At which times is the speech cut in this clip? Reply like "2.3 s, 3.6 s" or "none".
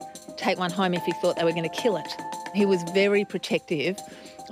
2.2 s